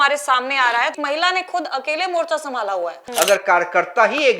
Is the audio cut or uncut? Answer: cut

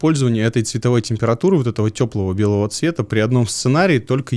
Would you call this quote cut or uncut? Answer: uncut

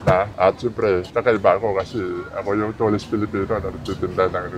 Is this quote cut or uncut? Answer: uncut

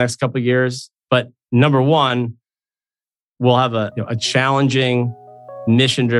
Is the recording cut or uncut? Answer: uncut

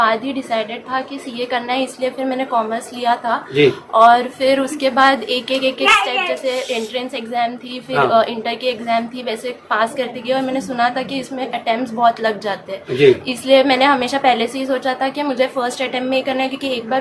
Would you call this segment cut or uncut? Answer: uncut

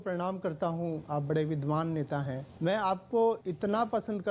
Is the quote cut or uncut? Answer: cut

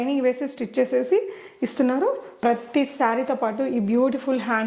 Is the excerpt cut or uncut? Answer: cut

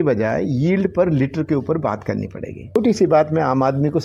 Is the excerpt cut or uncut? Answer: cut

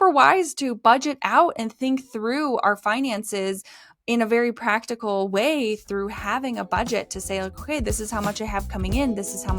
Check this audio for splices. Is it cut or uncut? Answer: uncut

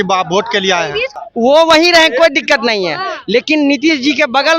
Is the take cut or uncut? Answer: cut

